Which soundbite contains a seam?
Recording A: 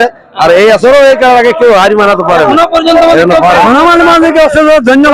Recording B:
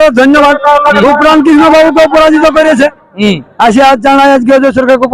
A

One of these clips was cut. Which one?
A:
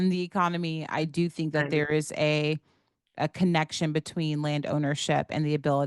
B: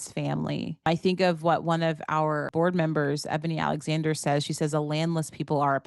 B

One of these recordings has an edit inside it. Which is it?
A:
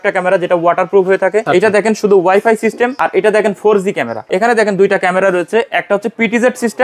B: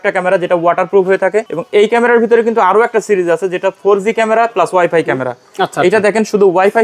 A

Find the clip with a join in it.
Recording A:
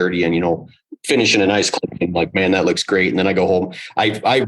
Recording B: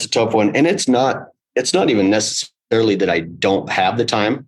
A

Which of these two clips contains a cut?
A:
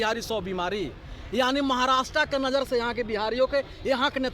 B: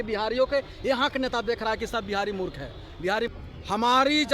B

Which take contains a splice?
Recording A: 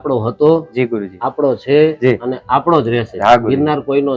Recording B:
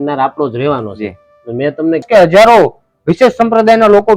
B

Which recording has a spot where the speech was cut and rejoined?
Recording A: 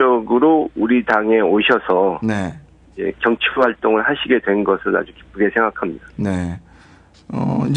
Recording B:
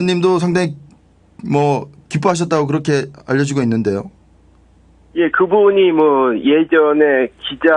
B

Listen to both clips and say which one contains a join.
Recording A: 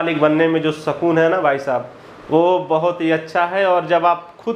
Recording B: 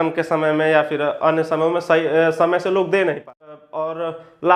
B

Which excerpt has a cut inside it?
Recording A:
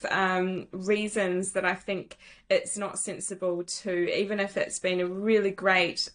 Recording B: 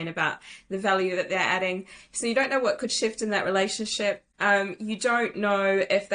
B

